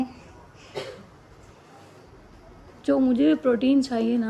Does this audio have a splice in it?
no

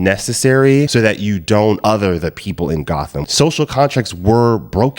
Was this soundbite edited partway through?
yes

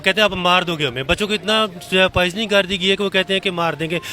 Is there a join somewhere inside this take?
no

